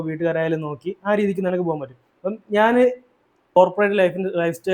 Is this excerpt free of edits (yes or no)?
no